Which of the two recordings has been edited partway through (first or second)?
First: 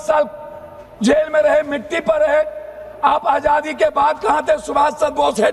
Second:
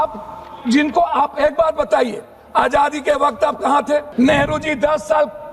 second